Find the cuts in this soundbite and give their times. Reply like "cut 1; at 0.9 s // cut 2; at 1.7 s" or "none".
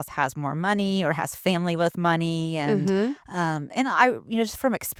none